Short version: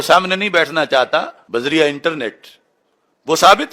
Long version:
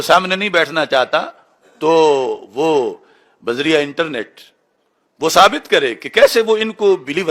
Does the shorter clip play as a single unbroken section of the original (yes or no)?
no